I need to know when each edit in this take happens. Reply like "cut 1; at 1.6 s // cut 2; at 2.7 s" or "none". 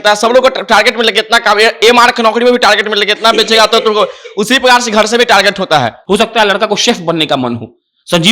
cut 1; at 6.0 s